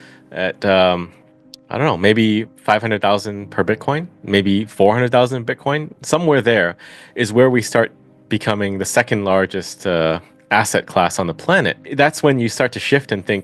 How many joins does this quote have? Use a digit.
1